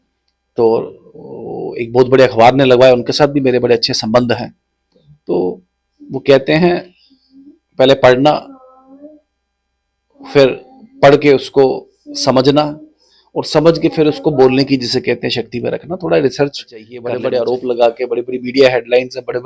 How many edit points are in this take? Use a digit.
1